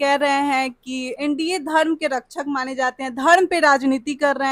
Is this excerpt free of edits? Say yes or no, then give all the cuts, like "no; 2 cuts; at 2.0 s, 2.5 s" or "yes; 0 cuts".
no; 1 cut; at 1.1 s